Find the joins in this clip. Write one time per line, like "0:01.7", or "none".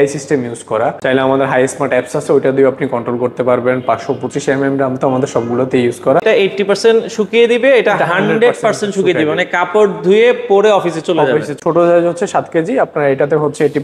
0:01.0
0:06.2
0:11.5